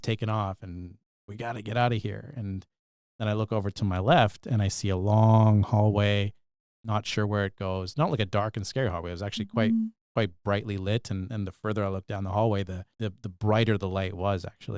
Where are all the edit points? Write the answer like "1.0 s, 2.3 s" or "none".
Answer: 12.8 s